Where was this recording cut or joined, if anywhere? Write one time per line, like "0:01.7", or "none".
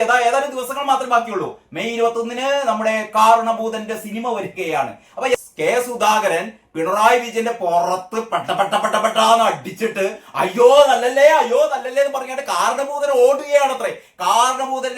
0:05.3